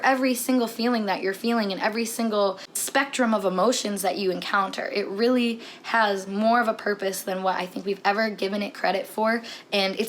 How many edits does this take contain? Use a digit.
1